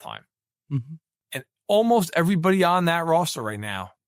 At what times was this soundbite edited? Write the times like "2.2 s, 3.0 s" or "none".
1.1 s